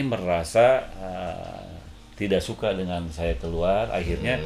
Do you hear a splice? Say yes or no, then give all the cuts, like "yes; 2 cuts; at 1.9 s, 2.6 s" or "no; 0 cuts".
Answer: no; 0 cuts